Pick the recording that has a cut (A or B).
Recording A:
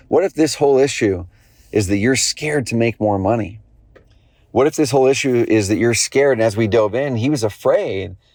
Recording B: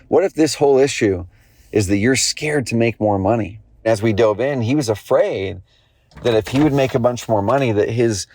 B